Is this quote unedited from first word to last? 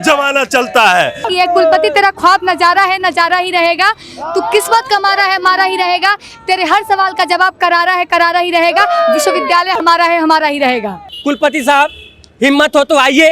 no; 2 cuts; at 1.3 s, 11.0 s

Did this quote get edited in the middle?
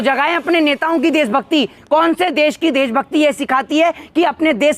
yes; 1 cut; at 1.8 s

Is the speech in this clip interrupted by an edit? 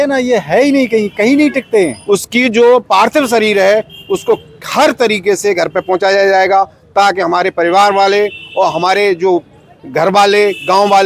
yes; 1 cut; at 2.0 s

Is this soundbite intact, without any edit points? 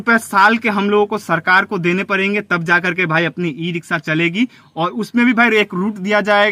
yes; 0 cuts

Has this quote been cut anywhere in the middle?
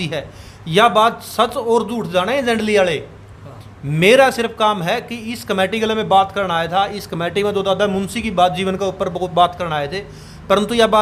no; 0 cuts

